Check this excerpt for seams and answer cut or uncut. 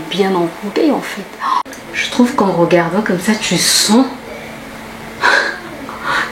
cut